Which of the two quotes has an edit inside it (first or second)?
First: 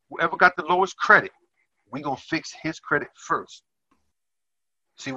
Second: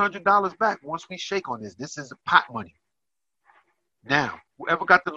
first